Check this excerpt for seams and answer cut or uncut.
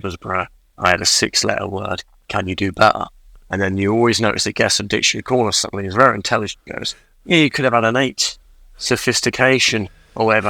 uncut